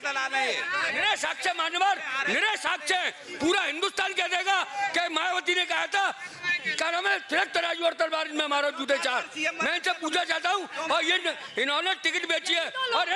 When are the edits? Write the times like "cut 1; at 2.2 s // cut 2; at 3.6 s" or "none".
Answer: none